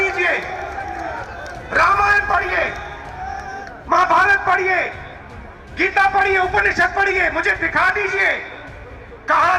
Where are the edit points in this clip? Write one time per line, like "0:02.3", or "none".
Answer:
0:01.3
0:03.6